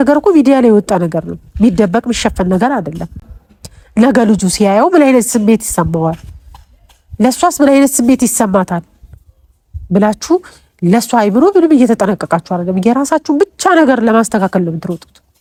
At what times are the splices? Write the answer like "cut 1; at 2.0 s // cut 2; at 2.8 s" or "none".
none